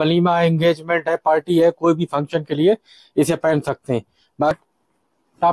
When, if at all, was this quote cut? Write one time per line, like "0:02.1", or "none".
0:04.5